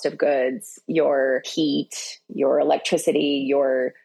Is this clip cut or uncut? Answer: cut